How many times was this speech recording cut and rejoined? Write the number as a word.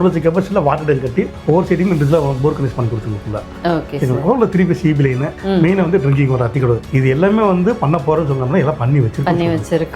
zero